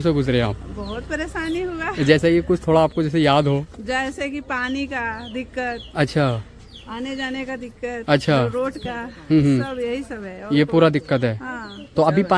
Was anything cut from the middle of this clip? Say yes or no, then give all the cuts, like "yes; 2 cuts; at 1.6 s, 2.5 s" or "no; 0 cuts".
no; 0 cuts